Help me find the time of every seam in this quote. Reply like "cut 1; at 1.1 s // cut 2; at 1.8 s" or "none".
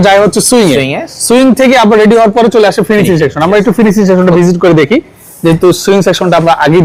none